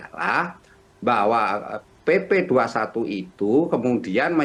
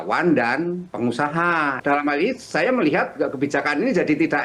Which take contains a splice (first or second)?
second